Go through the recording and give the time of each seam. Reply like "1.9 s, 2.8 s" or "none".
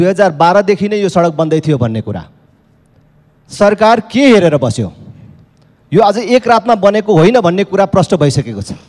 none